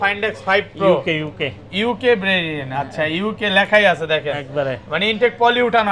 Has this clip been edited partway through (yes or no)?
no